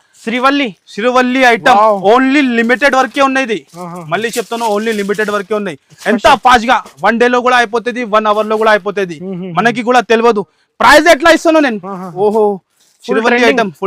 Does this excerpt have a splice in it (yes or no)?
no